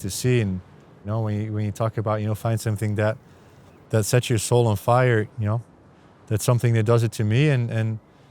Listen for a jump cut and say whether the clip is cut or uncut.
cut